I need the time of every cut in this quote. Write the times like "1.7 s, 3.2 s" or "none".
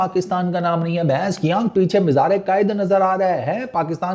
none